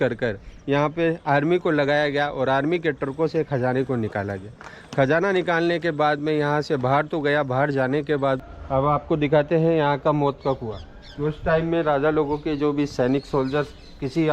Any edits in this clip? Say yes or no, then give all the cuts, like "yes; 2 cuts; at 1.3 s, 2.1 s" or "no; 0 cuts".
yes; 1 cut; at 8.4 s